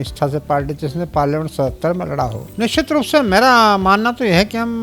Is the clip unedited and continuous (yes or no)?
no